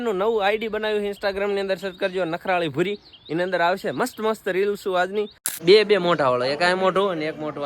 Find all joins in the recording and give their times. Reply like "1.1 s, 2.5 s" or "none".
5.4 s